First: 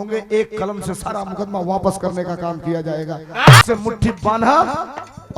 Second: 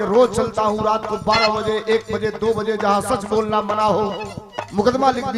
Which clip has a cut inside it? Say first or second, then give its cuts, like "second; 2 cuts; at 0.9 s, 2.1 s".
first; 1 cut; at 3.6 s